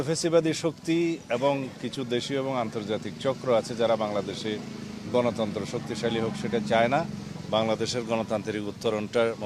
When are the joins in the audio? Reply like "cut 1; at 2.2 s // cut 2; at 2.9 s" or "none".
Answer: none